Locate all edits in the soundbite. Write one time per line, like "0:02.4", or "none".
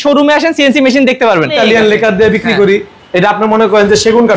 0:01.5

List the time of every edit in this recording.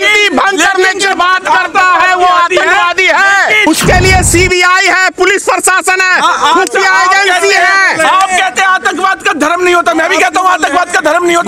0:03.6

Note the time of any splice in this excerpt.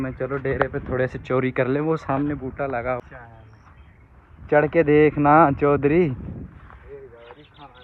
0:03.0

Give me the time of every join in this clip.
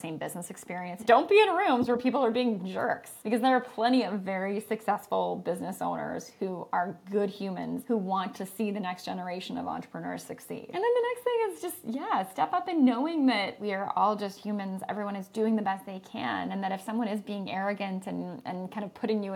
0:00.9
0:03.1
0:07.8
0:10.7
0:13.6

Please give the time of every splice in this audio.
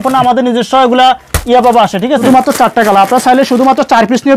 0:02.2

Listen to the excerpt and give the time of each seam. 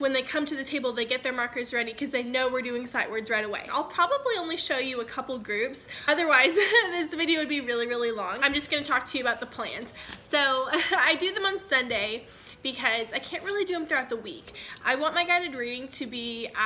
none

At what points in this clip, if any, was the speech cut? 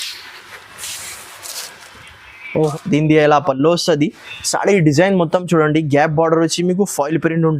0:02.7

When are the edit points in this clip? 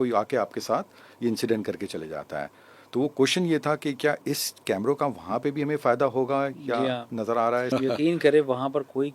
0:07.7

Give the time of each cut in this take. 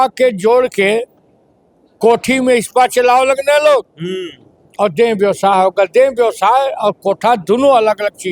none

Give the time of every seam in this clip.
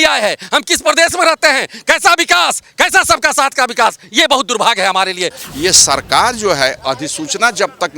0:05.4

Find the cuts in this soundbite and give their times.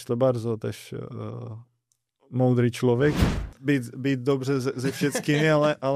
0:03.3

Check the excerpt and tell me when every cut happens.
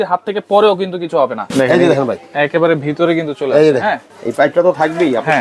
0:01.4
0:04.1

